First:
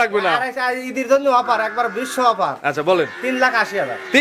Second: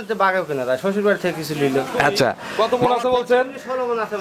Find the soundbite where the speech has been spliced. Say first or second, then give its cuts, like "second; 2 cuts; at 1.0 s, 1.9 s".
second; 1 cut; at 2.4 s